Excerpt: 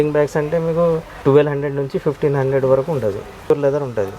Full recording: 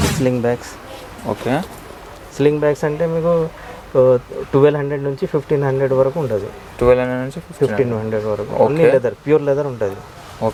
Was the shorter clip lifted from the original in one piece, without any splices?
no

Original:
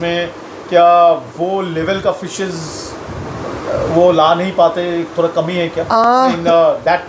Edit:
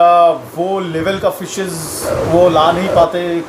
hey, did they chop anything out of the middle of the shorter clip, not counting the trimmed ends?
yes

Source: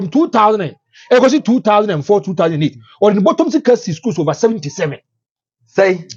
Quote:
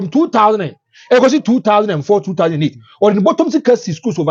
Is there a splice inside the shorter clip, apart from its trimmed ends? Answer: no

